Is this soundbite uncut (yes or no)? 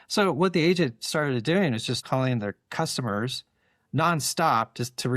no